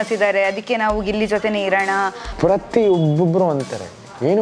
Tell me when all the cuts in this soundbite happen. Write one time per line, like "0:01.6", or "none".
0:02.2